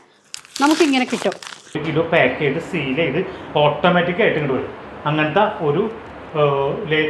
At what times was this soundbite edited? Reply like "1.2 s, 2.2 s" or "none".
1.8 s

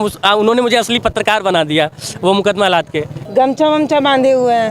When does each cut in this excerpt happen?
3.1 s

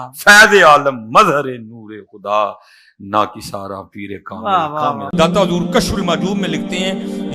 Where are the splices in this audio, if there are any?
5.0 s

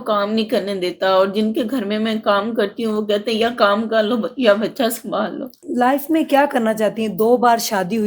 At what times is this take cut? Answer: 5.6 s

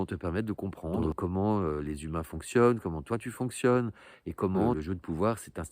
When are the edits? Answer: 1.0 s, 4.8 s

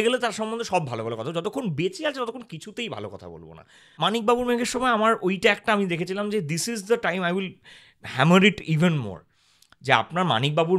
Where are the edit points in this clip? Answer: 3.9 s

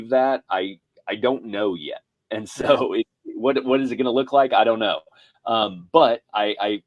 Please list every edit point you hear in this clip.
none

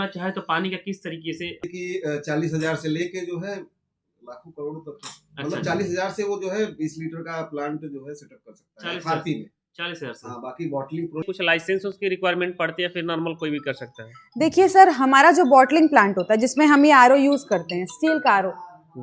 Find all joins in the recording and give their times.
1.6 s, 11.2 s

